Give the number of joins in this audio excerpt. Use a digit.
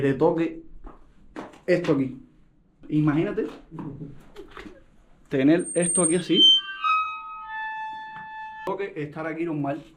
2